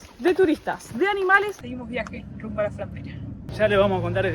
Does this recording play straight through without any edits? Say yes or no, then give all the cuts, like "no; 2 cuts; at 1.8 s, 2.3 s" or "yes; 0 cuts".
no; 2 cuts; at 1.6 s, 3.4 s